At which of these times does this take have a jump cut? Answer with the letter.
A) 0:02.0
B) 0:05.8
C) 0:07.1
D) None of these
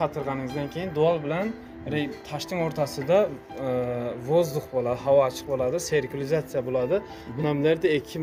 D